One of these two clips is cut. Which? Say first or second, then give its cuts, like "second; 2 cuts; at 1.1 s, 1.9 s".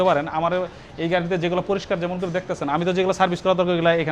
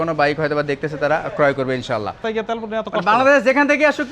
second; 1 cut; at 2.2 s